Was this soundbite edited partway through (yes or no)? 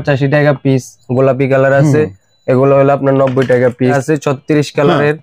yes